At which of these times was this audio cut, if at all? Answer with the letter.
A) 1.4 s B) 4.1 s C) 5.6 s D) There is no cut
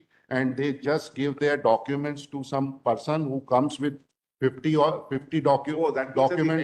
D